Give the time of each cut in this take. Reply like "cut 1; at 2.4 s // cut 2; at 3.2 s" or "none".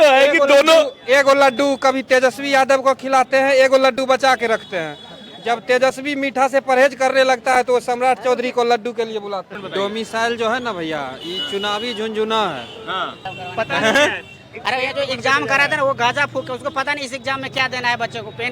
cut 1; at 9.6 s // cut 2; at 13.3 s